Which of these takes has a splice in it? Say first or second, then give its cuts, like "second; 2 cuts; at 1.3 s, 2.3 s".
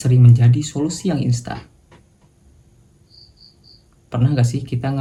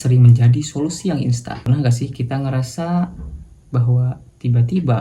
second; 1 cut; at 1.7 s